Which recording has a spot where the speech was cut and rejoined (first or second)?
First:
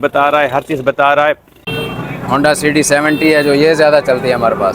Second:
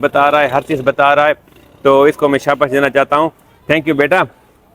first